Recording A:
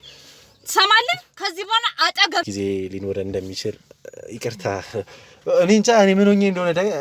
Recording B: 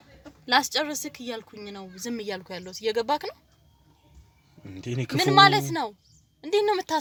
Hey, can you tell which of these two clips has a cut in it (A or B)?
A